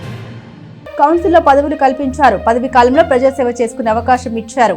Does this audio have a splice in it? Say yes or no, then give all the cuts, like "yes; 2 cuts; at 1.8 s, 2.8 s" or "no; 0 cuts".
no; 0 cuts